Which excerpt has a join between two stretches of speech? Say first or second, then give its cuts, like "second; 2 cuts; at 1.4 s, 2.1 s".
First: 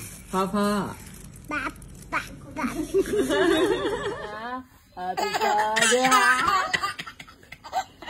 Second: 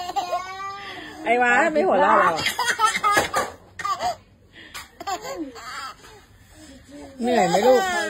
first; 1 cut; at 4.4 s